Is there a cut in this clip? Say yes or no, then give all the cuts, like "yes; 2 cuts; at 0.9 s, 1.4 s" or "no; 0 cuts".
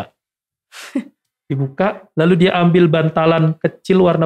no; 0 cuts